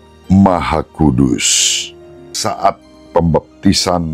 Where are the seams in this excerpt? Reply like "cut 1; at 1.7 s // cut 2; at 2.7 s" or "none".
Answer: cut 1; at 2.4 s